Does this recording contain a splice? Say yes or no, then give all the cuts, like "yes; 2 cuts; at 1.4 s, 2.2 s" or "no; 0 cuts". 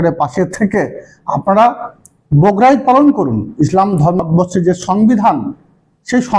yes; 1 cut; at 4.2 s